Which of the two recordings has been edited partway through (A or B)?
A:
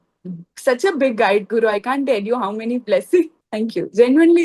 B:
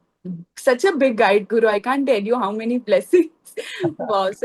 A